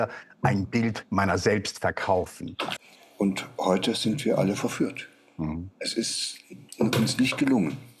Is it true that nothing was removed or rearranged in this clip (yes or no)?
no